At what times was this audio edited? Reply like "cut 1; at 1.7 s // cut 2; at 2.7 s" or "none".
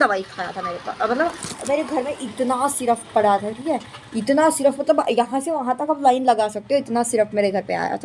none

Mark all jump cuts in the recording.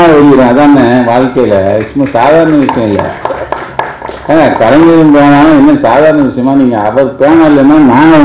none

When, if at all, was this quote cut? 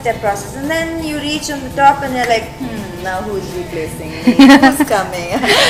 none

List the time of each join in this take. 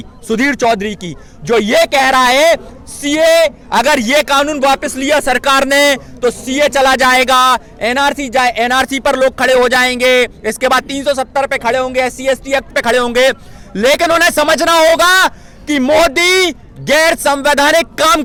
none

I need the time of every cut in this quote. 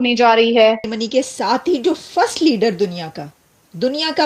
cut 1; at 1.0 s

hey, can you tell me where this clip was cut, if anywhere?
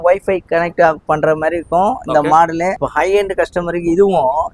cut 1; at 2.8 s

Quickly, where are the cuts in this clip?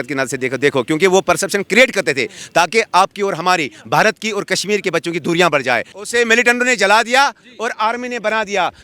cut 1; at 6.0 s

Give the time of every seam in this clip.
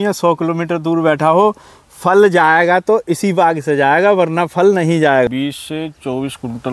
cut 1; at 5.3 s

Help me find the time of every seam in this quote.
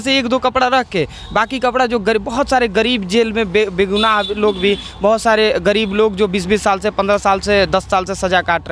none

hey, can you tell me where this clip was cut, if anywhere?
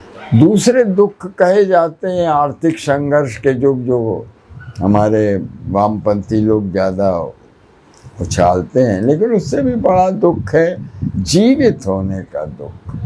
none

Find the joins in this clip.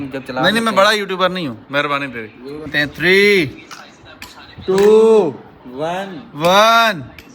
cut 1; at 2.7 s

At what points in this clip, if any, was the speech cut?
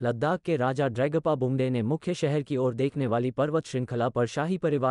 none

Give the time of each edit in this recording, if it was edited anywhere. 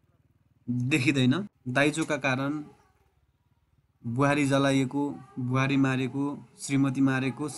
cut 1; at 1.6 s

